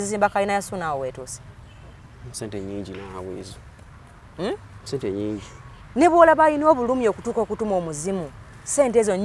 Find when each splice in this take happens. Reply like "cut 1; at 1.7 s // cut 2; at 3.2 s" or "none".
none